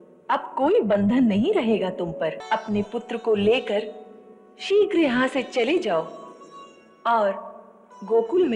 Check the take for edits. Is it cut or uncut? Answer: cut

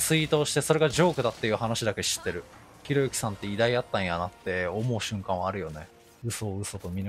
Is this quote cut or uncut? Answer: uncut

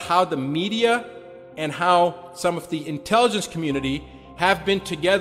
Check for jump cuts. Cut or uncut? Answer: uncut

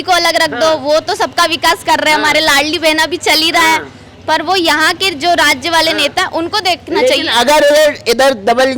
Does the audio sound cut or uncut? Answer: uncut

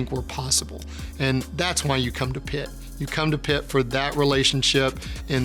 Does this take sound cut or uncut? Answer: uncut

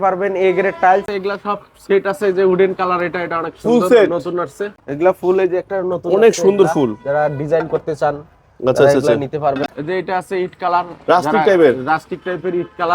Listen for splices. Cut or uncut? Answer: cut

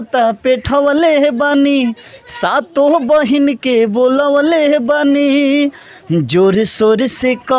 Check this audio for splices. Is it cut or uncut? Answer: uncut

